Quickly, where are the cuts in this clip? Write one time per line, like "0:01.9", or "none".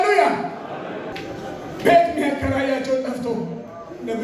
0:01.1